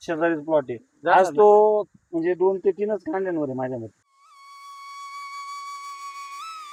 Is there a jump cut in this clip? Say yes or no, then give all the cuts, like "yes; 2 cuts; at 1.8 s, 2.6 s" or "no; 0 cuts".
no; 0 cuts